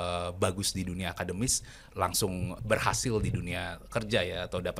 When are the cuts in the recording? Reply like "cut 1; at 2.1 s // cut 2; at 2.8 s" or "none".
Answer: cut 1; at 2.5 s